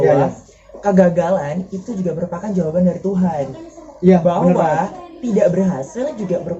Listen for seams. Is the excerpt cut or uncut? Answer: uncut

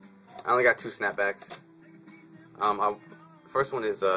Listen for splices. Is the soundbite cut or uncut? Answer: uncut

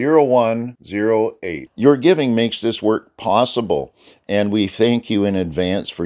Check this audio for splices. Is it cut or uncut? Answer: uncut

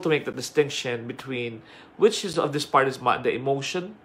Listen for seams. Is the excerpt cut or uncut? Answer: uncut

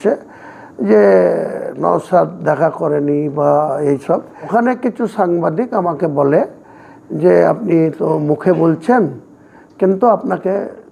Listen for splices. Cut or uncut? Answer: cut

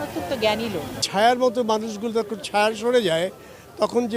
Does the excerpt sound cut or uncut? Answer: cut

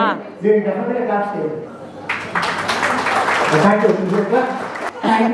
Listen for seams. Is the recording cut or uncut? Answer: uncut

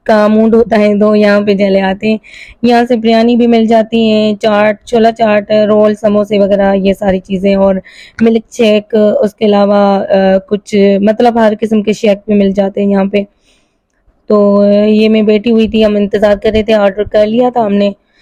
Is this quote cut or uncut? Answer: uncut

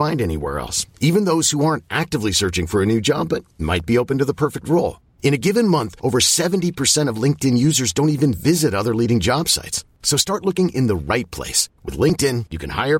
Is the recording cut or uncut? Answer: uncut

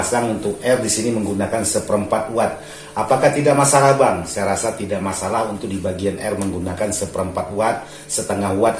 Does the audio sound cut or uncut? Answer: uncut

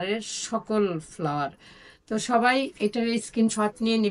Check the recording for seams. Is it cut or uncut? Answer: uncut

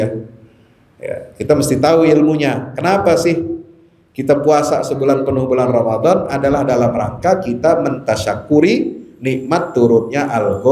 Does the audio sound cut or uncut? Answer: uncut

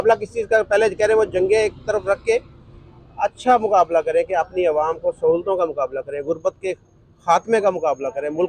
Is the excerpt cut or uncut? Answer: uncut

